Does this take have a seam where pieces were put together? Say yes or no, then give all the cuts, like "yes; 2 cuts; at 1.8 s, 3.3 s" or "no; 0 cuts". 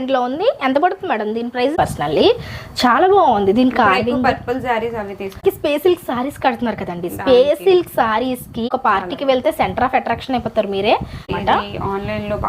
yes; 4 cuts; at 1.7 s, 5.4 s, 8.7 s, 11.3 s